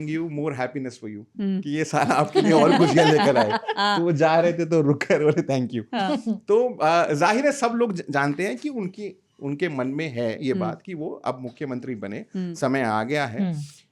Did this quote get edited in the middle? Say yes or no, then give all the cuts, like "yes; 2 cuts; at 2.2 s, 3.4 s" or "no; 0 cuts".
no; 0 cuts